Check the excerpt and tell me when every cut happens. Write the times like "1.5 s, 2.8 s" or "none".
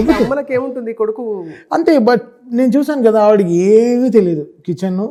none